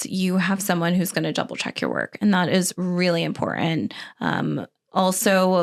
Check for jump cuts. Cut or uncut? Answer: uncut